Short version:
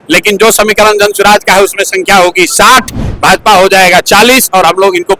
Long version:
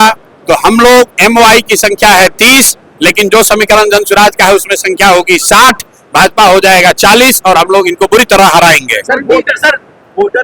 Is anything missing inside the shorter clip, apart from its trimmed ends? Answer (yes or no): no